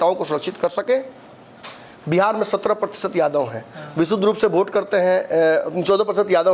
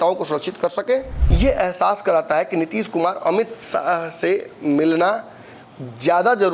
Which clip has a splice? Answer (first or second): second